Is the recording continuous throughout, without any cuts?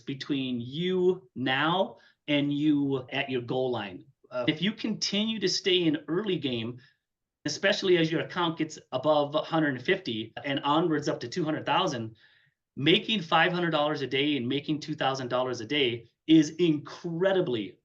no; 1 cut; at 4.4 s

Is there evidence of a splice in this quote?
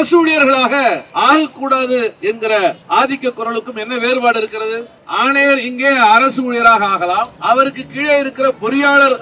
yes; 4 cuts; at 1.1 s, 2.8 s, 5.0 s, 7.3 s

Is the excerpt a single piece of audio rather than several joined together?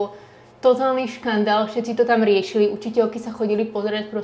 yes; 0 cuts

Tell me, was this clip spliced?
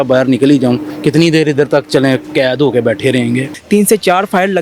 yes; 2 cuts; at 0.9 s, 3.5 s

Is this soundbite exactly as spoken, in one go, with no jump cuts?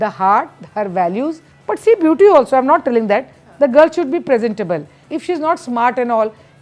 no; 2 cuts; at 1.5 s, 5.0 s

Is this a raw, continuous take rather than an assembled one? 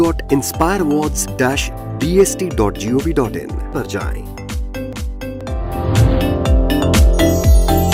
yes; 0 cuts

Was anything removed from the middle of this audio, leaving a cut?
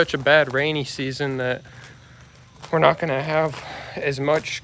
no; 0 cuts

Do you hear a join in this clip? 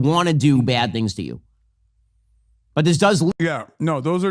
no; 0 cuts

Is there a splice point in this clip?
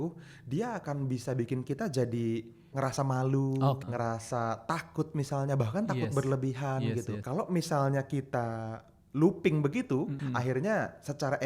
yes; 4 cuts; at 2.7 s, 3.8 s, 7.1 s, 10.1 s

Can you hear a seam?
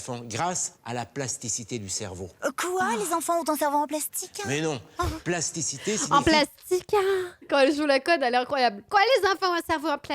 yes; 1 cut; at 7.4 s

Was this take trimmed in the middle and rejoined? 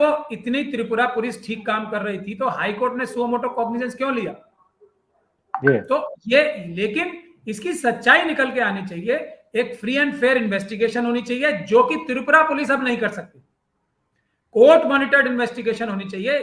no; 0 cuts

